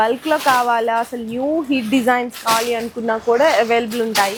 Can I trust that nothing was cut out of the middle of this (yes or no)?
yes